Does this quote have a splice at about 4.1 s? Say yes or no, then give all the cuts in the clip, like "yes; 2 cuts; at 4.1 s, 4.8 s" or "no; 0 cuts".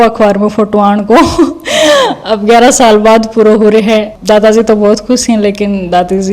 yes; 1 cut; at 4.1 s